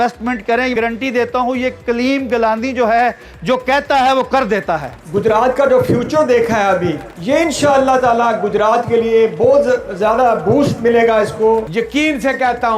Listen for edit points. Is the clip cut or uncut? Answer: cut